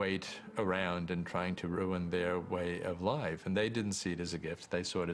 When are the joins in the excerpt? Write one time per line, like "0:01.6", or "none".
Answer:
0:02.4